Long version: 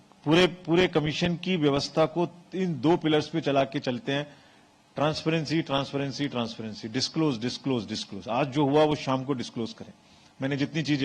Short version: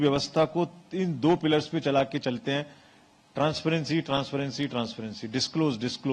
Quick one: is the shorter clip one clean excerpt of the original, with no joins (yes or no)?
yes